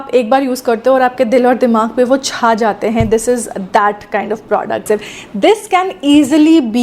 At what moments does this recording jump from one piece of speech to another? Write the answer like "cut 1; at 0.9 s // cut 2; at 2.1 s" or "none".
cut 1; at 4.8 s